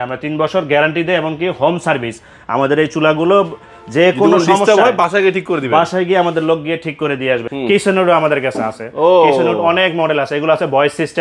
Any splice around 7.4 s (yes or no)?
yes